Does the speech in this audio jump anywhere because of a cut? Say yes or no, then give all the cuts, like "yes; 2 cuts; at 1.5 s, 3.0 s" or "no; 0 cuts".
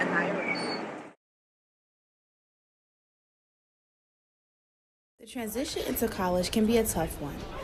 no; 0 cuts